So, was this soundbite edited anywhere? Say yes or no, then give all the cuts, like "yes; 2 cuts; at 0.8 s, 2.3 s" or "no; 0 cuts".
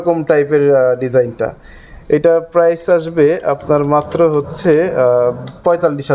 no; 0 cuts